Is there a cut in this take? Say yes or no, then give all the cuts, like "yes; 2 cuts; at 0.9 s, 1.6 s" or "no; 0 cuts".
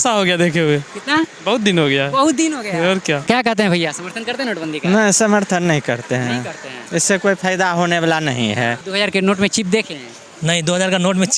yes; 2 cuts; at 3.2 s, 8.8 s